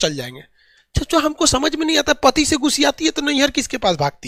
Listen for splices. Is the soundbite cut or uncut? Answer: uncut